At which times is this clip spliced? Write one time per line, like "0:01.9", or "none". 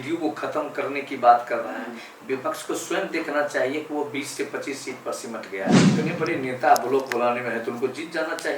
0:05.8